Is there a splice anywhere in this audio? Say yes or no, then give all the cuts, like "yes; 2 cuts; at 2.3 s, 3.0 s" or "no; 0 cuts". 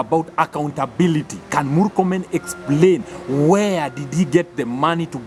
no; 0 cuts